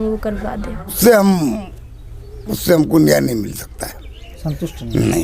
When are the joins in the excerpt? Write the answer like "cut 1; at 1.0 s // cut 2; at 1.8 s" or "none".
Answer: cut 1; at 1.0 s